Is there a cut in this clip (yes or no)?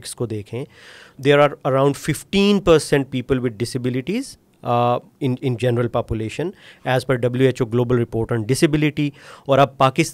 yes